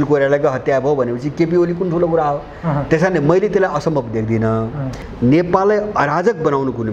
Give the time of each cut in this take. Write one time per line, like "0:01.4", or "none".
0:05.0

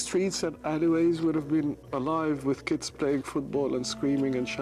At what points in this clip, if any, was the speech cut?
0:01.8

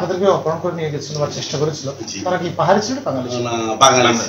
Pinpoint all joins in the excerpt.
none

